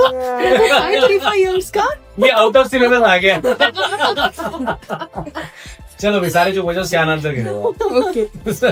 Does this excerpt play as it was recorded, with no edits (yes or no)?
yes